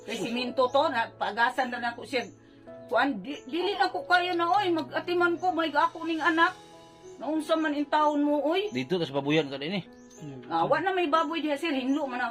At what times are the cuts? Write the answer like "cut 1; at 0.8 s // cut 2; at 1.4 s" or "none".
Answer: none